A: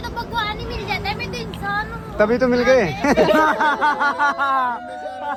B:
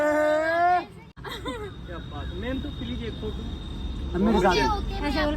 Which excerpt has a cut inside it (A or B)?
B